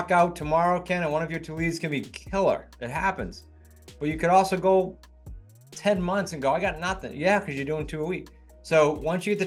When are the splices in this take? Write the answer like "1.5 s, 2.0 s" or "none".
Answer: none